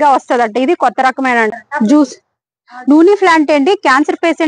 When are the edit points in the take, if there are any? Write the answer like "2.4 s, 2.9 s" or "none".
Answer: 1.5 s